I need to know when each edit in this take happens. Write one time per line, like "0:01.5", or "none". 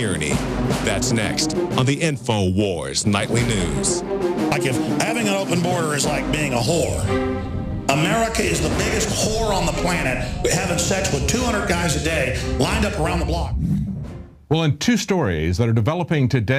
0:11.4